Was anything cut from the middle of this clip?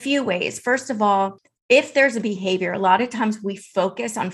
yes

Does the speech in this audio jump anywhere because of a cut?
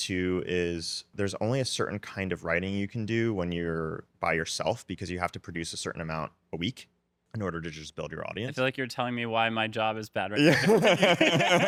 no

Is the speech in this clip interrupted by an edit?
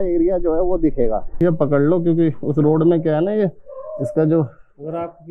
yes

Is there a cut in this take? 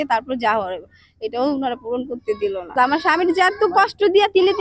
yes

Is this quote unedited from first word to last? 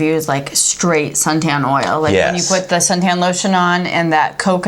yes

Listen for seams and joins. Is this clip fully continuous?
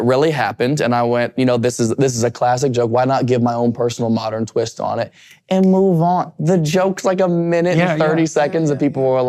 yes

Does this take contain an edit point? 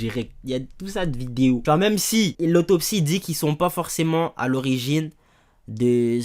yes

